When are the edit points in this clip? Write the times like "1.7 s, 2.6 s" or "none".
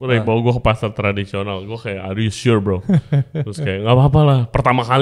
none